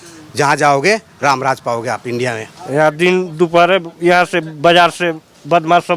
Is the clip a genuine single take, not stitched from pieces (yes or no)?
no